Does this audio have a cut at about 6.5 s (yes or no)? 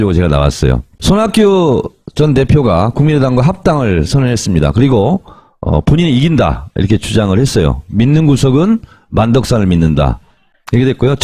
no